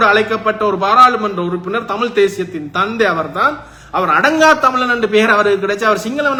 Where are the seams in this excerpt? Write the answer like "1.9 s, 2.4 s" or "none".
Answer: none

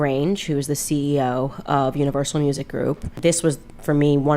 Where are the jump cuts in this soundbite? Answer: 3.2 s

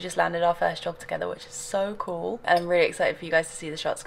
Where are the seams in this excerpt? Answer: none

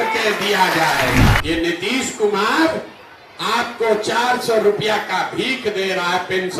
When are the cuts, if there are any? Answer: 1.4 s

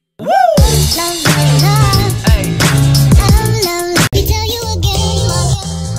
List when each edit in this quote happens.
1.9 s

